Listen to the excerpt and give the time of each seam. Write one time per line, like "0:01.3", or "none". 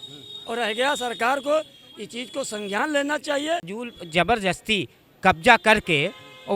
0:03.8